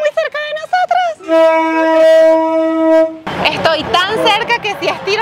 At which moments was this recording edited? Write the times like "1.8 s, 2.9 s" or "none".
3.3 s

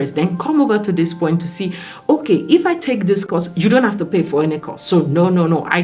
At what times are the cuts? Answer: none

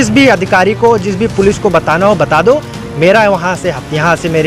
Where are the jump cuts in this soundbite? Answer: none

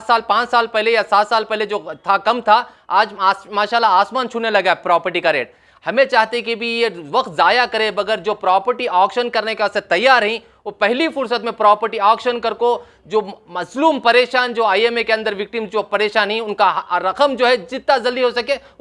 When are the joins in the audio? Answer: none

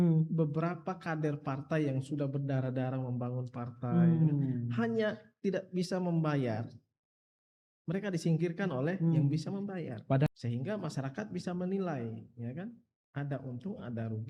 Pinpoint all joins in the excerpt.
10.3 s

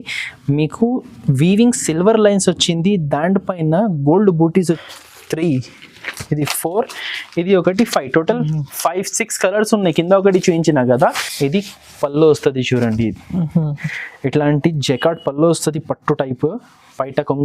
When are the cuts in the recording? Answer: 4.8 s, 11.3 s

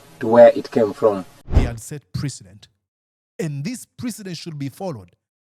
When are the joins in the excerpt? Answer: 1.4 s

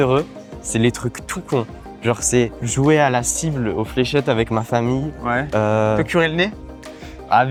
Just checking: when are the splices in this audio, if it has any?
none

